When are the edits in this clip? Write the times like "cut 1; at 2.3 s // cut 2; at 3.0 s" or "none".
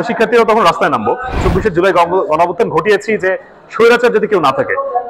cut 1; at 1.4 s